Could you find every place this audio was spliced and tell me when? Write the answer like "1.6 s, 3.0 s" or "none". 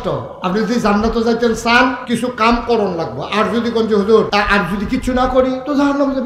2.0 s, 4.3 s